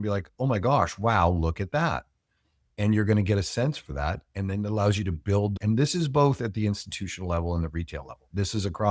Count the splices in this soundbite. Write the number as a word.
one